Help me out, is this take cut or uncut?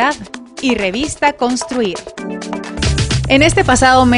cut